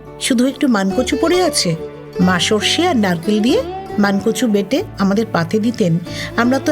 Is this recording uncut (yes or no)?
no